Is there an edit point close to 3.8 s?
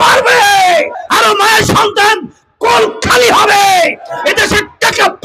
no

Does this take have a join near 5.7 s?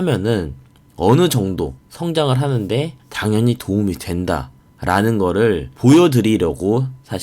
yes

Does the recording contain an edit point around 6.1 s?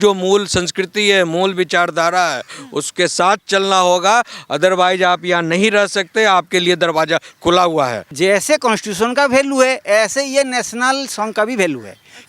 no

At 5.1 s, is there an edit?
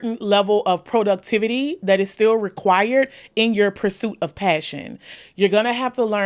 yes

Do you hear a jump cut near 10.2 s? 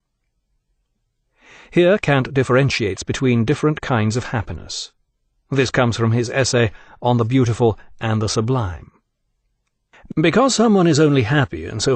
no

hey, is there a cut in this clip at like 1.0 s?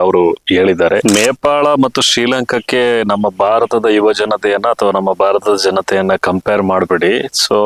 yes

